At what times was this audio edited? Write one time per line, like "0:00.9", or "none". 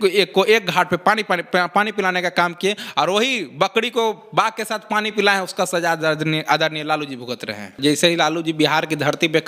0:07.7